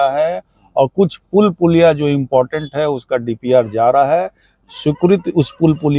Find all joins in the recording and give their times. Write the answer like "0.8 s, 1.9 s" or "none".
none